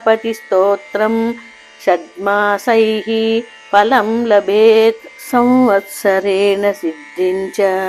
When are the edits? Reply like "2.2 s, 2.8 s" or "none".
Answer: 5.1 s